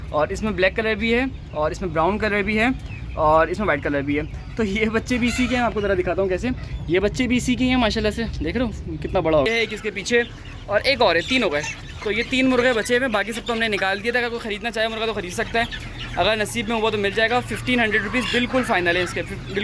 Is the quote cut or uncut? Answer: cut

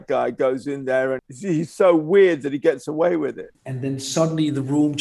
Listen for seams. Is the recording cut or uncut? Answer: cut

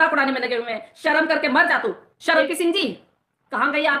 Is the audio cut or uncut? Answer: cut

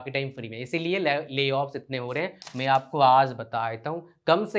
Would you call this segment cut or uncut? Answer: cut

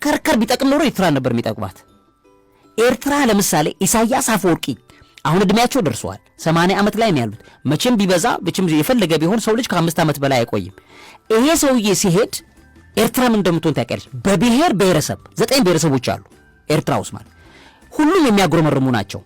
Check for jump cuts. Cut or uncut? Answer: uncut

